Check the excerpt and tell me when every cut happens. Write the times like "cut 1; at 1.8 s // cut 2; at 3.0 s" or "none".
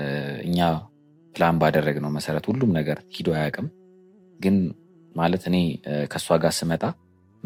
none